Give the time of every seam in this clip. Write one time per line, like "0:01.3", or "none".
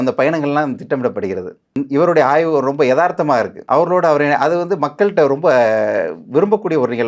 0:01.7
0:03.6